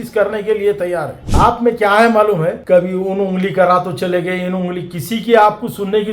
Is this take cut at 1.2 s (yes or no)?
yes